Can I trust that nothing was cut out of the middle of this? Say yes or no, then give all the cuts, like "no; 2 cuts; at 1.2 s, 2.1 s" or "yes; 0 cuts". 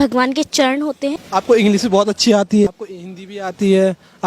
no; 2 cuts; at 1.2 s, 2.7 s